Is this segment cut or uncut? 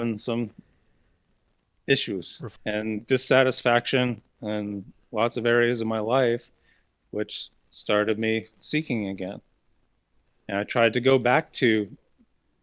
cut